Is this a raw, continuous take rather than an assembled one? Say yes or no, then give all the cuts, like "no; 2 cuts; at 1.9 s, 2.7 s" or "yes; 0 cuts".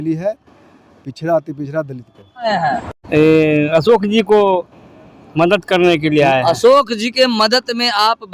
no; 1 cut; at 2.5 s